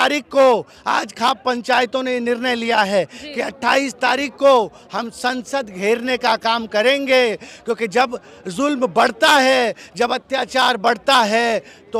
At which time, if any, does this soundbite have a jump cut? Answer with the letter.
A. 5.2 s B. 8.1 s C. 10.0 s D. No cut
D